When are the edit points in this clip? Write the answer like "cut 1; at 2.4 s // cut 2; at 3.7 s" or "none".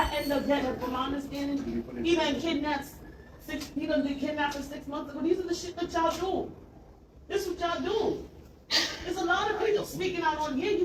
none